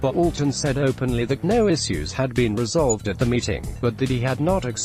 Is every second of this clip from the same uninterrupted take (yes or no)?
yes